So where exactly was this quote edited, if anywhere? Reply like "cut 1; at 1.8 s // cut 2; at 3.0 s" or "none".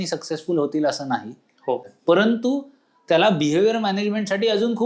cut 1; at 1.9 s